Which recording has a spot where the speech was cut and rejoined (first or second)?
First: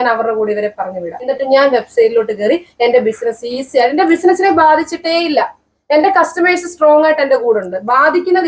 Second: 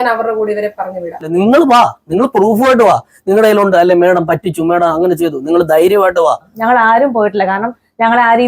second